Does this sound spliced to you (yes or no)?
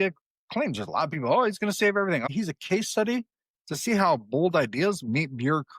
yes